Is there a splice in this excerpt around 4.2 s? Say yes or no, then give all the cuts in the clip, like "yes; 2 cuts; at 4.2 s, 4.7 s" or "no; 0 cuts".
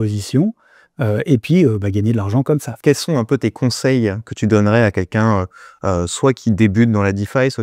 no; 1 cut; at 2.7 s